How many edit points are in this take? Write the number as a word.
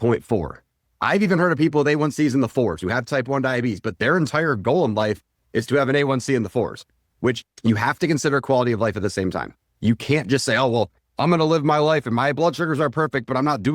one